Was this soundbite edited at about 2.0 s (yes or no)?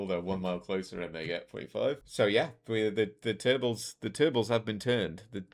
yes